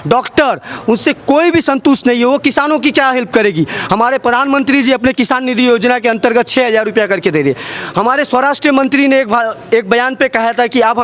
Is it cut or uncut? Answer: uncut